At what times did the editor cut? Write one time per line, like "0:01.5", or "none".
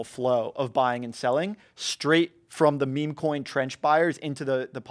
none